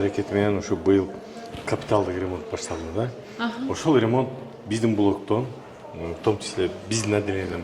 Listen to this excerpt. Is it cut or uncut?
uncut